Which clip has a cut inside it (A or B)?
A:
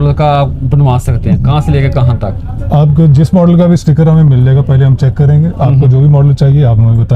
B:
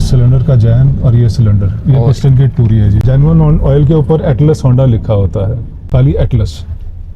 B